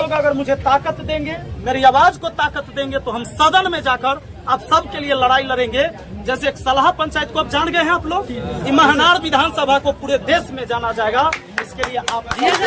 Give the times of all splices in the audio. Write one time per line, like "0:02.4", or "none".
none